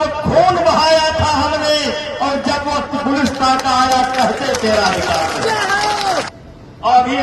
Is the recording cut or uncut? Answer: uncut